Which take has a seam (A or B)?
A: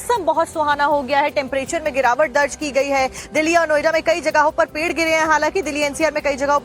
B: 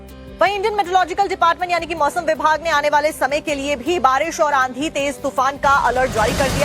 B